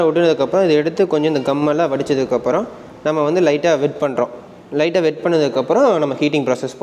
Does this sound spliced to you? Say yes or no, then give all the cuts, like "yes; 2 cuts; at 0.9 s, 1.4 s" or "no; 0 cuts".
no; 0 cuts